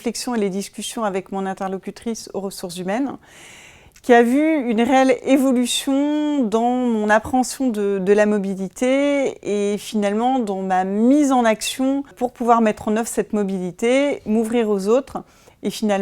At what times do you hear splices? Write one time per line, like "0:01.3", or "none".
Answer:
0:12.2